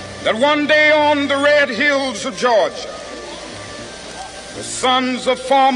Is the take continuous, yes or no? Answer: no